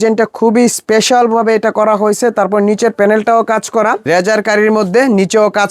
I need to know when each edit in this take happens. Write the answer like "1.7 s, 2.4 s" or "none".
4.0 s